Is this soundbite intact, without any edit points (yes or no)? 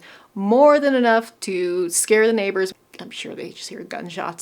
no